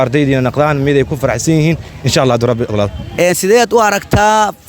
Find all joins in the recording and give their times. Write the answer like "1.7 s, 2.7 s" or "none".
3.0 s